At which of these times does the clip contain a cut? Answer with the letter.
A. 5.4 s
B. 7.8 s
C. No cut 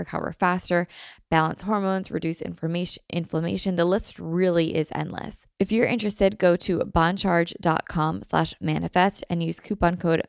A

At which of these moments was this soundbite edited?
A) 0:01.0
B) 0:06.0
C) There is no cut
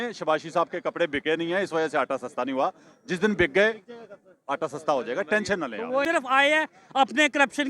B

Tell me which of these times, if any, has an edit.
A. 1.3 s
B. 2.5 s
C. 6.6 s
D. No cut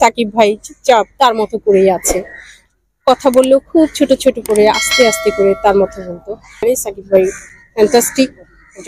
C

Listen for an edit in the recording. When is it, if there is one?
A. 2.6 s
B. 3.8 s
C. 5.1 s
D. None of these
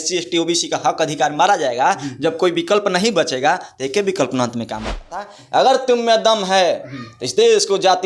C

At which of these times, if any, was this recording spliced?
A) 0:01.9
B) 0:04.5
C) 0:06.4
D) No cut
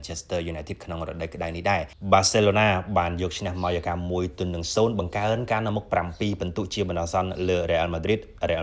A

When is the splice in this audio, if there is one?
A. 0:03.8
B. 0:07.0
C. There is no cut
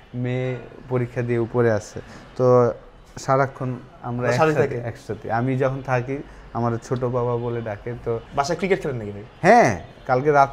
C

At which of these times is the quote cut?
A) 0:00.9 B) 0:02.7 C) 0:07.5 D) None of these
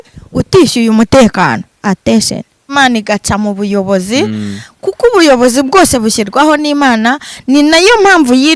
B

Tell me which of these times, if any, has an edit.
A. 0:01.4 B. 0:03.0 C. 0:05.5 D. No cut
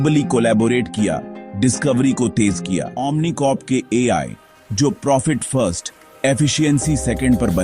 B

